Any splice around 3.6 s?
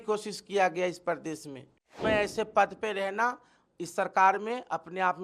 no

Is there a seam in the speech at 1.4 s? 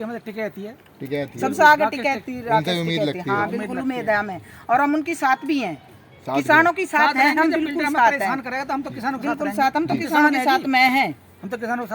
no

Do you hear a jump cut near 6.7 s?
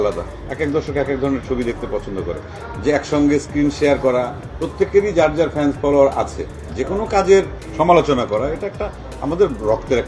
yes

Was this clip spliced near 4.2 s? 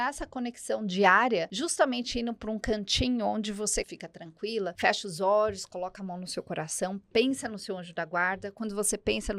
yes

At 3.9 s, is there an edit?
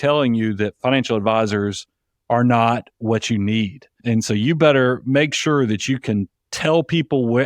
yes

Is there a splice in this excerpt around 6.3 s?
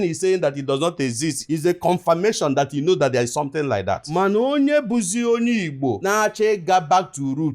no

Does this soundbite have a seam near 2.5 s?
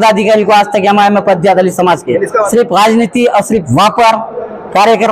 yes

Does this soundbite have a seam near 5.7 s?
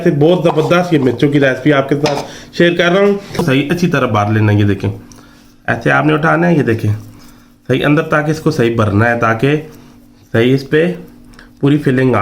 no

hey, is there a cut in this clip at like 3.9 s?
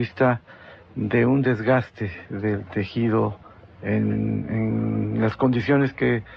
no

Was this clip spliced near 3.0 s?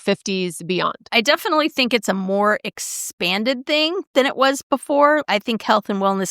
no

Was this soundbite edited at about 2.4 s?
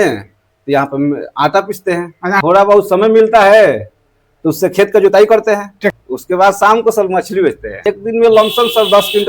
yes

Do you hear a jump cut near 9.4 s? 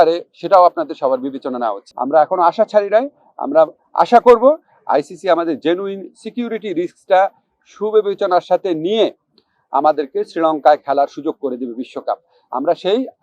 no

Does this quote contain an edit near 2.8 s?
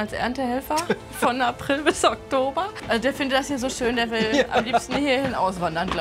yes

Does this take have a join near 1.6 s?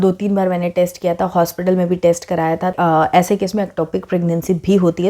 no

